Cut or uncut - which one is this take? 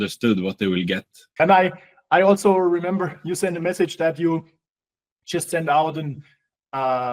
cut